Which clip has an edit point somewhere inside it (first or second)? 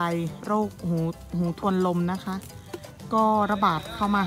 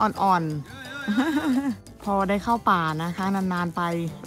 second